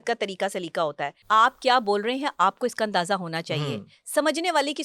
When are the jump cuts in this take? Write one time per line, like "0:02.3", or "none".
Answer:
0:01.2